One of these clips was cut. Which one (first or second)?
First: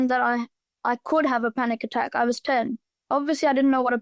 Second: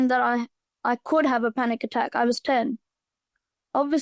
first